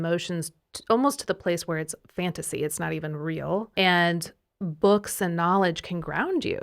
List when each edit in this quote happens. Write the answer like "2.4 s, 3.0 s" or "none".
3.7 s